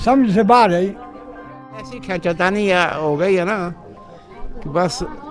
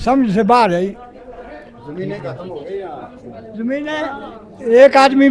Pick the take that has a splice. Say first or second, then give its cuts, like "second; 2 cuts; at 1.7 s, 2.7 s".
first; 1 cut; at 1.9 s